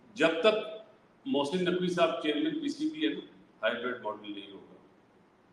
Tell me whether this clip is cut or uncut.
uncut